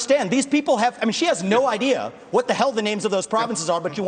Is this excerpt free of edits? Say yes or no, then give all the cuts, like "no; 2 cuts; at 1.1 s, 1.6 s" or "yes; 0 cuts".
yes; 0 cuts